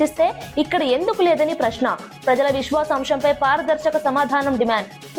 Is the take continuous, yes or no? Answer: yes